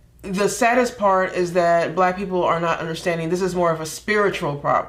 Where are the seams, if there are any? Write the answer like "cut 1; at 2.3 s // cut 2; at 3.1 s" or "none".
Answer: none